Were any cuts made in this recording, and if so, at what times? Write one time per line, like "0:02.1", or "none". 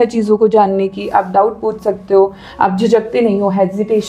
none